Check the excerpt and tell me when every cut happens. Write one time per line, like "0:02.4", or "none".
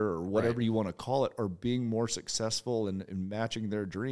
none